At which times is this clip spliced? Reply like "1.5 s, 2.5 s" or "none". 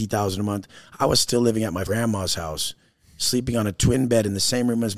1.8 s